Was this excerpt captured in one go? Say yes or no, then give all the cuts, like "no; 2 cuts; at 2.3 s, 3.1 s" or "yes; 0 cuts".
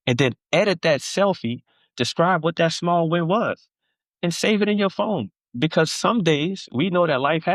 yes; 0 cuts